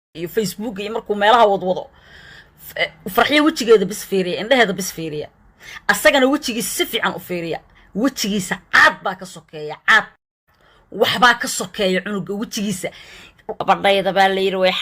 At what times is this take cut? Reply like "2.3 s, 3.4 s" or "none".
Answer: 13.6 s